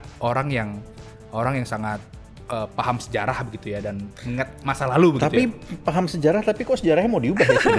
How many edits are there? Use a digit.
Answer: 0